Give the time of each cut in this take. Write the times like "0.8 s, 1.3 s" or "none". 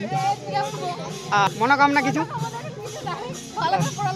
1.5 s